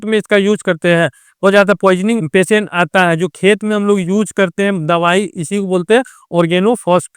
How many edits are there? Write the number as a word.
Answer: two